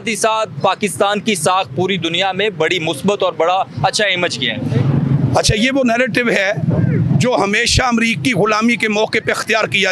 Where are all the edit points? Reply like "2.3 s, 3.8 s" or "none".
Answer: none

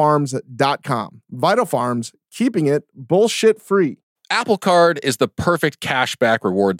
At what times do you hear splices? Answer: 4.1 s

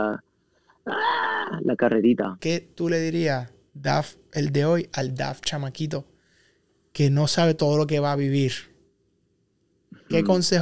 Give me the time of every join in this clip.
2.4 s

